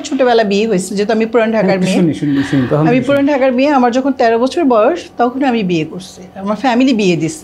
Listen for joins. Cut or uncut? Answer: uncut